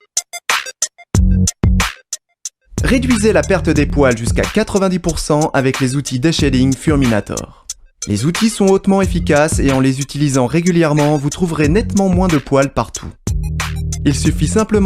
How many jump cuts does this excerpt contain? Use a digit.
1